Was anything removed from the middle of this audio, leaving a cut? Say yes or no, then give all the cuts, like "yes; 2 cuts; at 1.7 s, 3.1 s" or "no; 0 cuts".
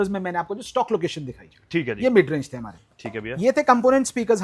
no; 0 cuts